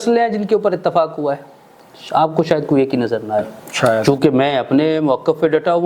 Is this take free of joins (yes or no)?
no